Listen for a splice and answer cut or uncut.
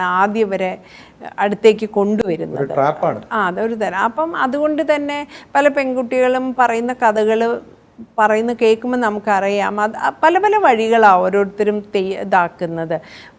uncut